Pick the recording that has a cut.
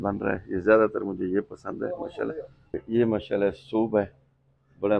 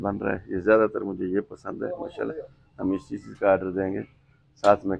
first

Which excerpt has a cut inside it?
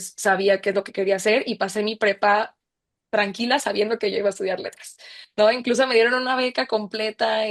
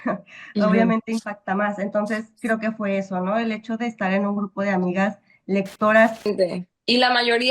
second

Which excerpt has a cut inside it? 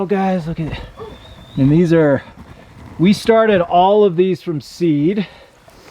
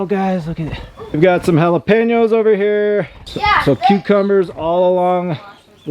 second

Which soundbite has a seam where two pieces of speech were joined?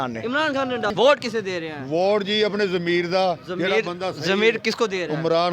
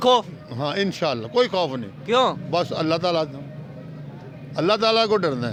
first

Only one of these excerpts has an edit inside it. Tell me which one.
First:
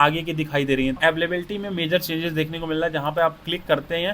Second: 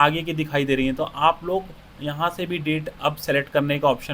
first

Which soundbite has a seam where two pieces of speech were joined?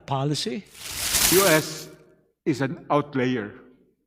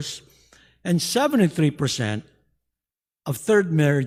first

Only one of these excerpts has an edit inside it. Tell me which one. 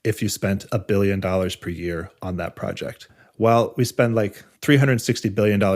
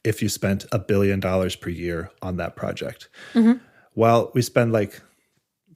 first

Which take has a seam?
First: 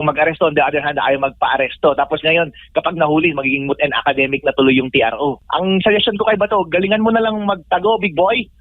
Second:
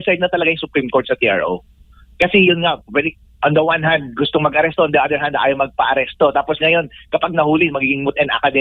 first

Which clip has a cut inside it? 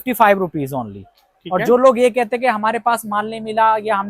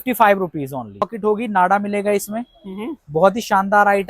second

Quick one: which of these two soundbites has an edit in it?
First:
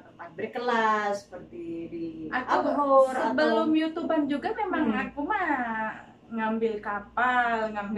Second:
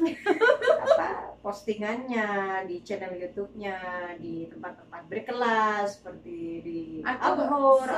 second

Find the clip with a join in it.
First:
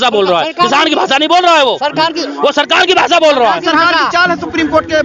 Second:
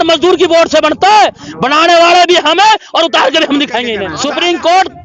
second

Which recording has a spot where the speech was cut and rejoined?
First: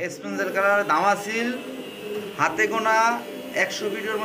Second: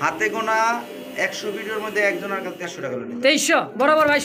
second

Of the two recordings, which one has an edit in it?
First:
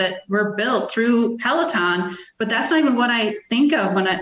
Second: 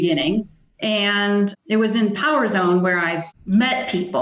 second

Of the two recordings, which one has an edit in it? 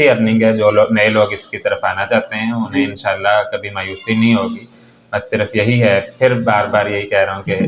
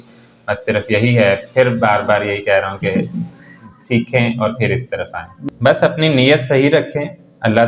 second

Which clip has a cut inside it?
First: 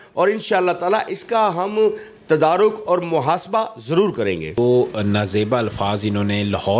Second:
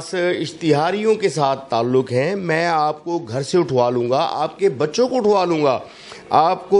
first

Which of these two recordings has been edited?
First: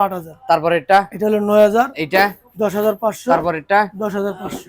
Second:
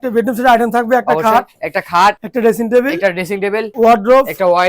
second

